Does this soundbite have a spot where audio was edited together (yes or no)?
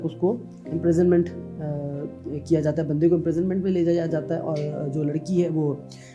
no